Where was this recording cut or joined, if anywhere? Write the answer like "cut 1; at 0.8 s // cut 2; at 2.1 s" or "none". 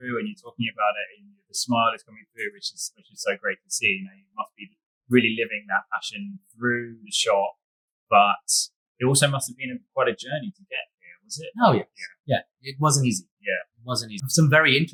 none